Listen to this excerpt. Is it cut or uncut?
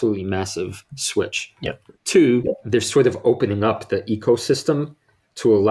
uncut